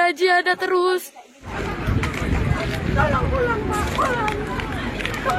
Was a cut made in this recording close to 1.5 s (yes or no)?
yes